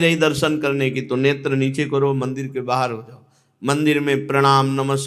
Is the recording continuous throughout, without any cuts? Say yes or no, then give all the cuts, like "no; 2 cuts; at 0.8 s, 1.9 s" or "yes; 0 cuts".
yes; 0 cuts